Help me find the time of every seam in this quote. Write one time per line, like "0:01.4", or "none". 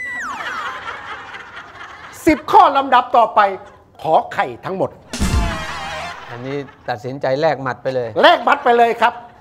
none